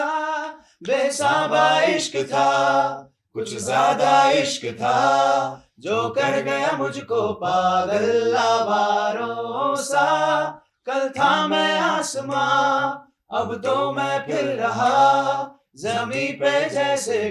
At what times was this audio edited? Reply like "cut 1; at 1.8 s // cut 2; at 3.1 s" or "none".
none